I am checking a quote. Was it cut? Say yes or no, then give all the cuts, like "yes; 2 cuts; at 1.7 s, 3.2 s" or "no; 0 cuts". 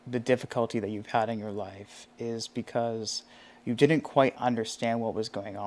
no; 0 cuts